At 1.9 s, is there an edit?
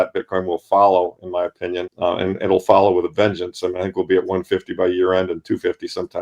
yes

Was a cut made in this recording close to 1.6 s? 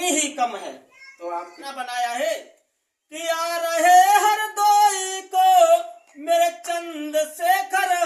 yes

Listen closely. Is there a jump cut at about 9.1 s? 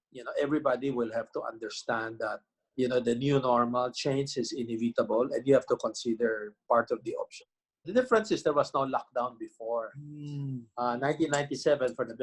no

